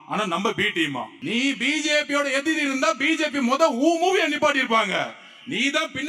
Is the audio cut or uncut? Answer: cut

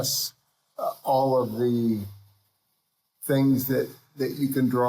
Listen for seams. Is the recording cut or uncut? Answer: uncut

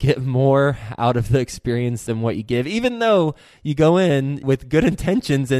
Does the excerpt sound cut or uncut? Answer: cut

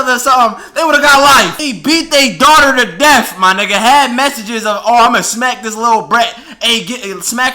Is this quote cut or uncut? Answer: cut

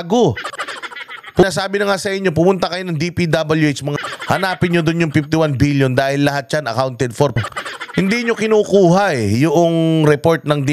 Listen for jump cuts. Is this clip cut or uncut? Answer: uncut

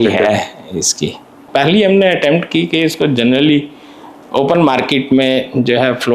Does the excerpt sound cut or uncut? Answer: cut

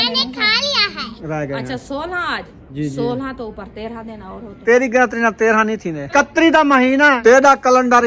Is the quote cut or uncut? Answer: cut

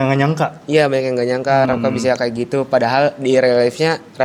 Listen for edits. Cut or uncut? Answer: uncut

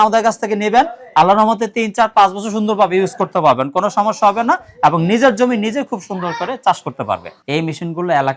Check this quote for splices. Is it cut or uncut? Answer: cut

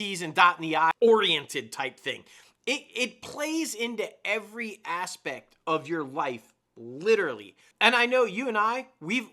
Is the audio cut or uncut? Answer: cut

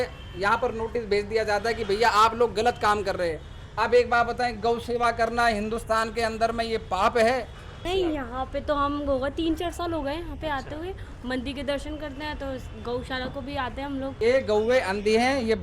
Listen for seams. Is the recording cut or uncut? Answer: cut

